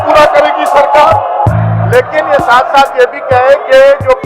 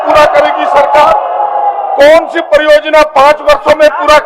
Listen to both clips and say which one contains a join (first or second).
first